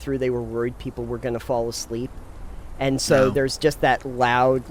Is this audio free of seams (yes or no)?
yes